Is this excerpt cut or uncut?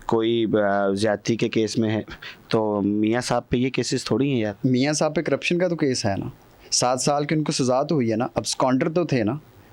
uncut